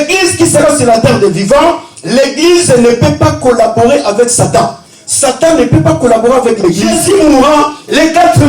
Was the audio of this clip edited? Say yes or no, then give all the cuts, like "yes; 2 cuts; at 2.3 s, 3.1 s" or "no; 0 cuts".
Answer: yes; 1 cut; at 6.9 s